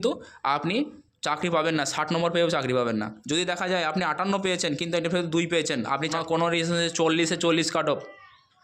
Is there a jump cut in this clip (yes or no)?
yes